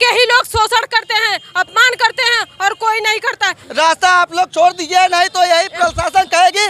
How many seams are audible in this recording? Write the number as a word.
one